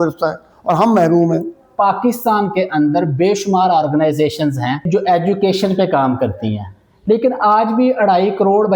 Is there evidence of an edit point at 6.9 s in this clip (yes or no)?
no